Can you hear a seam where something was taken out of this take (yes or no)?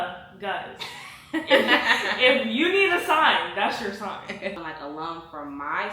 yes